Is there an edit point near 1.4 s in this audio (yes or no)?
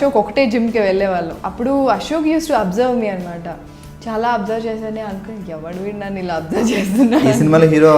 yes